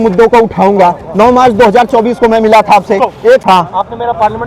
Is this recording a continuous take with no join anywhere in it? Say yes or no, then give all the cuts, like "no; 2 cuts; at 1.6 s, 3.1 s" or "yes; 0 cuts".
no; 1 cut; at 3.4 s